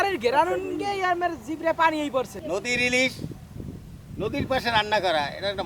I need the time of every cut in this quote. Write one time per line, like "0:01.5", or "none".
0:02.3